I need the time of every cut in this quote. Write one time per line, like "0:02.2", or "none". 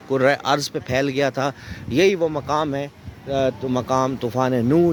none